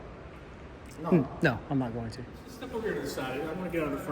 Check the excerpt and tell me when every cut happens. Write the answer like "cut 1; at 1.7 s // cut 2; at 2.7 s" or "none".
cut 1; at 2.6 s